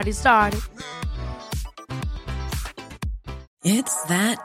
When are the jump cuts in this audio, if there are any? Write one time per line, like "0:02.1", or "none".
0:03.5